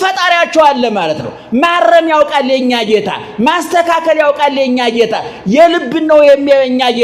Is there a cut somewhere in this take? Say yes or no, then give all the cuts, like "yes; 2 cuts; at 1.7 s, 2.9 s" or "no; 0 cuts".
no; 0 cuts